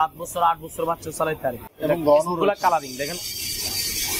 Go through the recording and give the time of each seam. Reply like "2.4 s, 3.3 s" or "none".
1.7 s

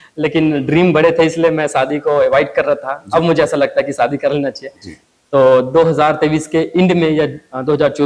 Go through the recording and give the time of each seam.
none

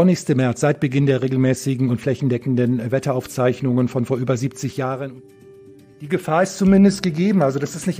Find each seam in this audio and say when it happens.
5.8 s

